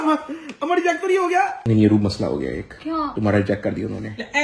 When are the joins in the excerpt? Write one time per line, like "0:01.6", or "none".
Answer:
0:01.6

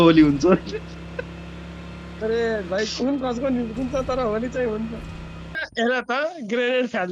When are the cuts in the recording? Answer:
0:05.7

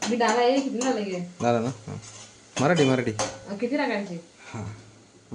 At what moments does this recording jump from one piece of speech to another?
none

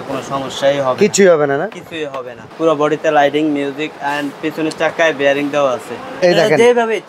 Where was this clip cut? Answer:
0:02.4
0:06.0

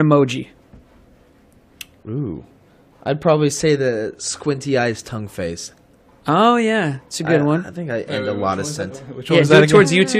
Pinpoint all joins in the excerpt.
0:06.4

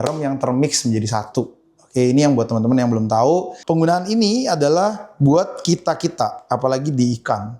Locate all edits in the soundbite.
0:03.5

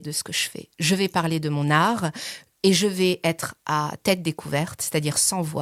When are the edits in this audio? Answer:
none

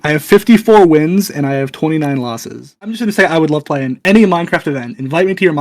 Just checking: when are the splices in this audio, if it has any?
0:02.8

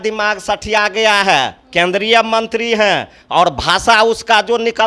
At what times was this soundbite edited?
none

